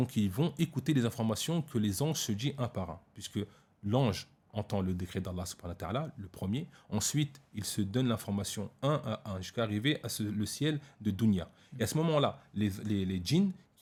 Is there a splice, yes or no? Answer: no